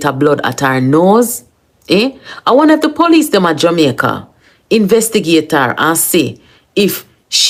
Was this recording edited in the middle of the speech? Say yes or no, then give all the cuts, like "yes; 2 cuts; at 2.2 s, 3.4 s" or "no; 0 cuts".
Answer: no; 0 cuts